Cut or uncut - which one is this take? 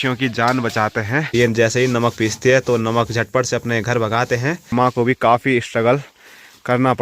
cut